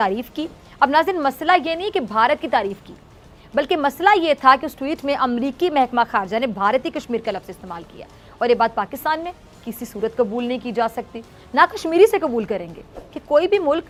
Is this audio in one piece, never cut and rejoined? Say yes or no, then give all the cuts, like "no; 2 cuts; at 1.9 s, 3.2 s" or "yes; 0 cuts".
yes; 0 cuts